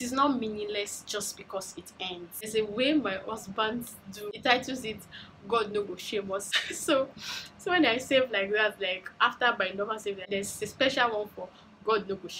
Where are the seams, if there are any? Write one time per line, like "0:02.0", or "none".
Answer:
0:02.5
0:04.3
0:06.5
0:10.3